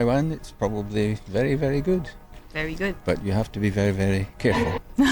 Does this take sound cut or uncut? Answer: uncut